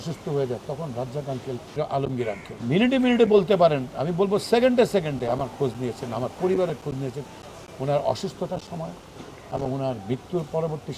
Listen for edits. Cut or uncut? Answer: cut